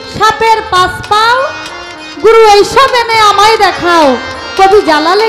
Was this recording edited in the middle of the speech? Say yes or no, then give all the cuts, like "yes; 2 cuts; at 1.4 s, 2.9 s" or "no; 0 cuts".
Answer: no; 0 cuts